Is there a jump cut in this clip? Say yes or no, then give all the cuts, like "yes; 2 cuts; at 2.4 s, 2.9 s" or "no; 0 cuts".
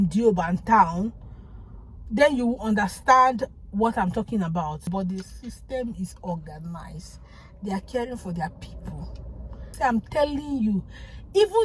yes; 2 cuts; at 4.9 s, 9.6 s